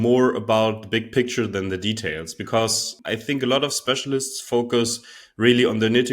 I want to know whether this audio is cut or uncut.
cut